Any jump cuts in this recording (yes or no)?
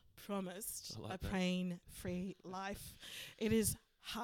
no